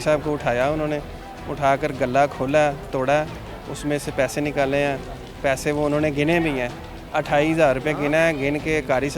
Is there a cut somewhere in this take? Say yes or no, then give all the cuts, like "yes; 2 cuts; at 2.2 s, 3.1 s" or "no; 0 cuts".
no; 0 cuts